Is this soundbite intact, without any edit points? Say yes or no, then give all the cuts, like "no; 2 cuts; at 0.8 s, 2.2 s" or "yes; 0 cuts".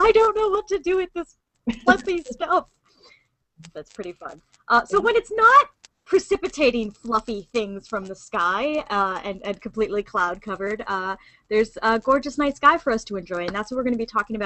no; 1 cut; at 6.2 s